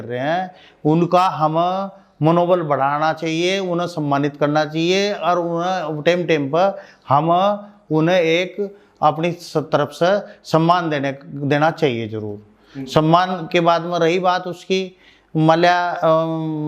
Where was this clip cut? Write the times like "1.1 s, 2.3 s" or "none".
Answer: none